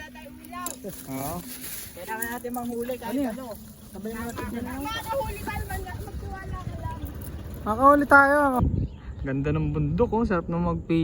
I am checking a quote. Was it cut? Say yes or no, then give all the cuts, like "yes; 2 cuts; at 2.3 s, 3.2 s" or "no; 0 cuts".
yes; 1 cut; at 8.7 s